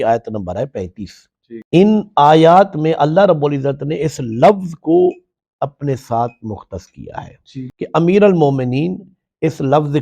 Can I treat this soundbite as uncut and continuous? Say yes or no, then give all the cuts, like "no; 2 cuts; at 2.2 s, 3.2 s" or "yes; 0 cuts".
no; 1 cut; at 7.7 s